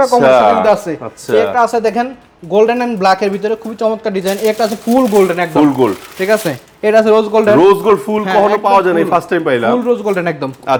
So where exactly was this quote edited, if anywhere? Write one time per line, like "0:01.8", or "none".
none